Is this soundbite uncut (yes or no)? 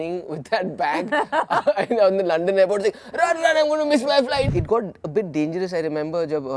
no